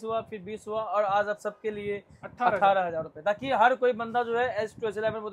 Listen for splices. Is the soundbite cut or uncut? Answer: uncut